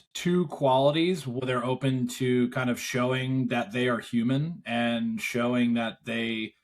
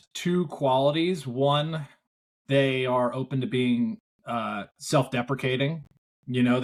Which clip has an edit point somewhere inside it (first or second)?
first